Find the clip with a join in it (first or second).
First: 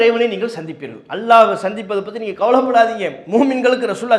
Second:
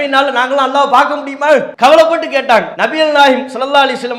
second